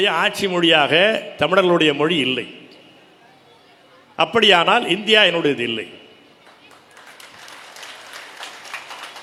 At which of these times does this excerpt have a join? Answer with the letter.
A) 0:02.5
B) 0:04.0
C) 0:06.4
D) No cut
D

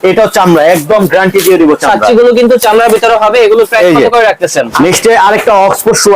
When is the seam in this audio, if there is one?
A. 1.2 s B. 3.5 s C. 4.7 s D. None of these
C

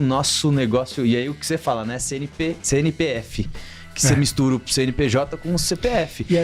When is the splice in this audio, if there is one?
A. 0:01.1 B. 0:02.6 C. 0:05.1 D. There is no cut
B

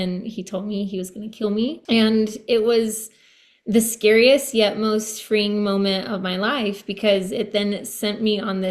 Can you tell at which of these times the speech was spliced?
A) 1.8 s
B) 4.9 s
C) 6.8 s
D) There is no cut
A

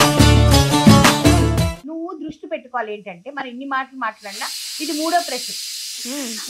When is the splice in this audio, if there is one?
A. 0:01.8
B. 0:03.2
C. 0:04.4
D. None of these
A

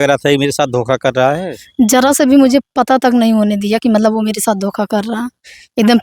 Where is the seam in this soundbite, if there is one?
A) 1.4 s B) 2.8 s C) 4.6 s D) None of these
D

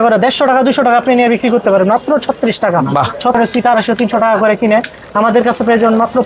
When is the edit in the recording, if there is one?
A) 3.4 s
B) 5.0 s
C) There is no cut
A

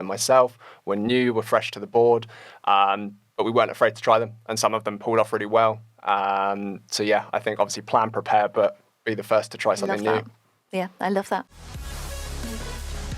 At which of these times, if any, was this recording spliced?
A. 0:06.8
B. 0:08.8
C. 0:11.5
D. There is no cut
C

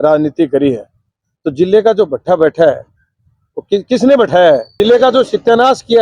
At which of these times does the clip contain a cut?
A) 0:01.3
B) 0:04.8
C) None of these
B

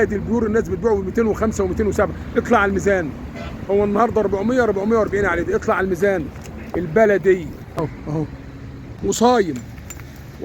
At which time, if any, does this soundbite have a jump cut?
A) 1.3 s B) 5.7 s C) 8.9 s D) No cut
C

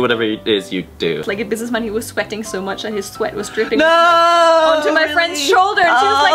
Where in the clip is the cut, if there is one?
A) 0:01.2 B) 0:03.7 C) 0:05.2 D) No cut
A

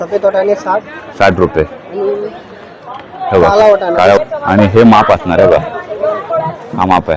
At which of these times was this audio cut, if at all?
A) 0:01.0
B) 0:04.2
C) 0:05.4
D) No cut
B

